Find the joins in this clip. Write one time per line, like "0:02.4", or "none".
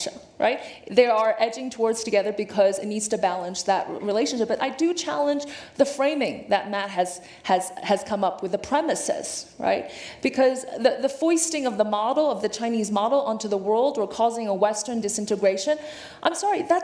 none